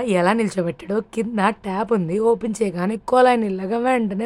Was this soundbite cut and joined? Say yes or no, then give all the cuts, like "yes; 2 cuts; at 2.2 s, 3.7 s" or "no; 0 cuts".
no; 0 cuts